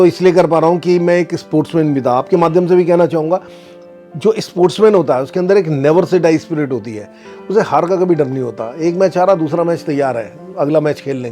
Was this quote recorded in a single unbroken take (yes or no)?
yes